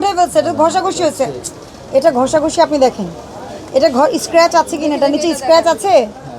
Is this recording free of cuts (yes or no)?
yes